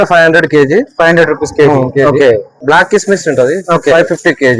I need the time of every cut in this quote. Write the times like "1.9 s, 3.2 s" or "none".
none